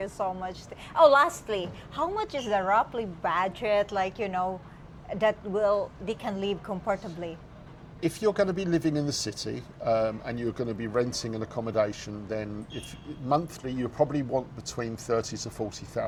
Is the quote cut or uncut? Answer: uncut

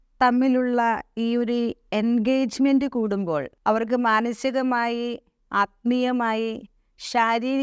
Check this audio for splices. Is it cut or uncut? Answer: cut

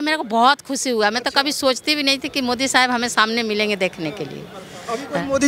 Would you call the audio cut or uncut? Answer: uncut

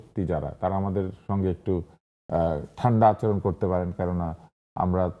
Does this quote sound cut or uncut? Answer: uncut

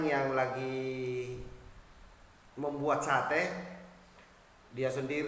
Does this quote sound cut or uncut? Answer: uncut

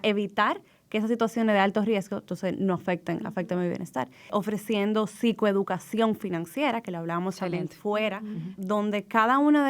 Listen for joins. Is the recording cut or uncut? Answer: cut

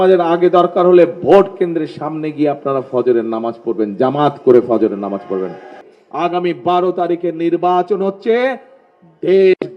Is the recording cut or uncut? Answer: cut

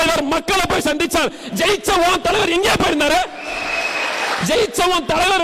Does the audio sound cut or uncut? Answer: uncut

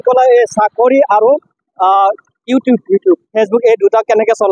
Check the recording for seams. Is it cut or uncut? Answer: uncut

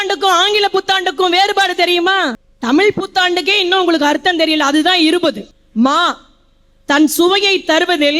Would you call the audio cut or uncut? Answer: cut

